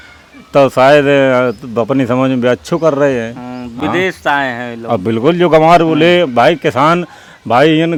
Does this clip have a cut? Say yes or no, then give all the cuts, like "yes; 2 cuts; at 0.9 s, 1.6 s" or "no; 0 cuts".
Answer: no; 0 cuts